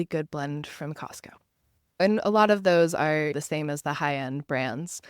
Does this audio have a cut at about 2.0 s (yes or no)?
yes